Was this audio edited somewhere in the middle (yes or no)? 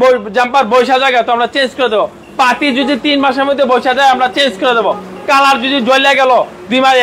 no